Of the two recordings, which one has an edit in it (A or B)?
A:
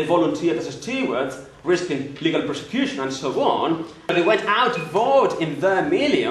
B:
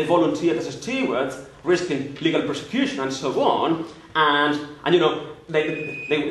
A